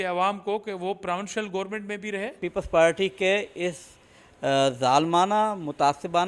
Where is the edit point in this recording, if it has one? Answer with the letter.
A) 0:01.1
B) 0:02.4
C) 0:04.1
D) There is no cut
B